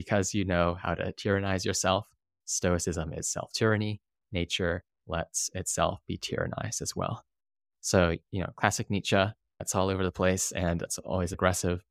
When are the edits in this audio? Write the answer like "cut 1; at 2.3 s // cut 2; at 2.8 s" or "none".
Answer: cut 1; at 9.7 s